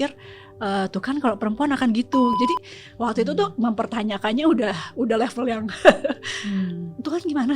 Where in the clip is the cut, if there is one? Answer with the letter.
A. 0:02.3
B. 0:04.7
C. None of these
A